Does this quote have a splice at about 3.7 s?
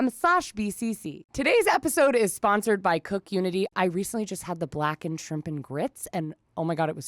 yes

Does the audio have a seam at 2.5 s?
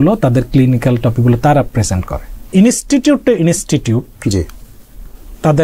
yes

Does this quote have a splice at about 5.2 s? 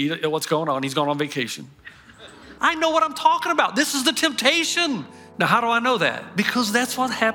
yes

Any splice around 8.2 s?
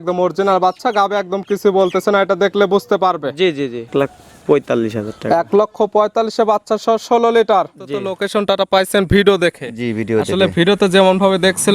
yes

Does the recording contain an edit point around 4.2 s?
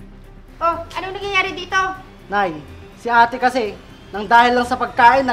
no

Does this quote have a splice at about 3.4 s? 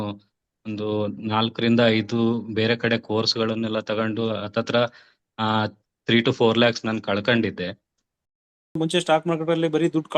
no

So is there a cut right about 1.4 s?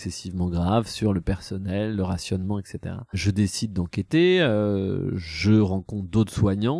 no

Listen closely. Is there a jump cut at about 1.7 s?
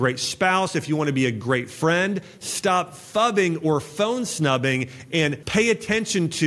no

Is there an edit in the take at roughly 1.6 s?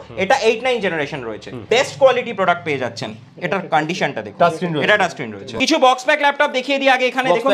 yes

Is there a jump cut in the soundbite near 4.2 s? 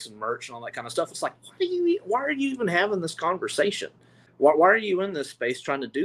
yes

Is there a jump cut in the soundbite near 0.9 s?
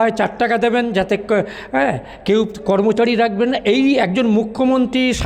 no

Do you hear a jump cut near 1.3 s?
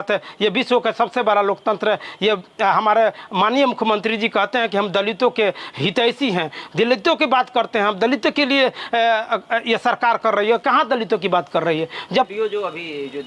no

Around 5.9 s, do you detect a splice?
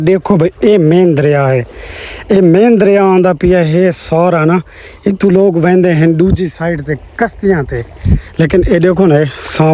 no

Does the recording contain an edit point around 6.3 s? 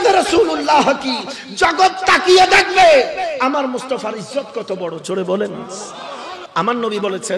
yes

